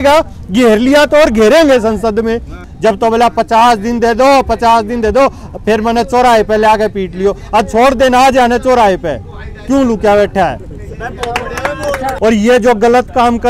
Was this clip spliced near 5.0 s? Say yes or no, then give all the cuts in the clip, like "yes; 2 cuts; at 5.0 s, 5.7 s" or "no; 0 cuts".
no; 2 cuts; at 2.6 s, 12.0 s